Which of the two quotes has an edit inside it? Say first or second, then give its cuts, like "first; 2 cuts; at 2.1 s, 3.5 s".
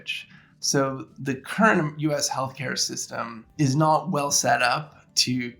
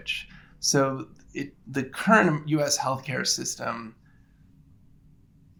first; 2 cuts; at 1.1 s, 3.4 s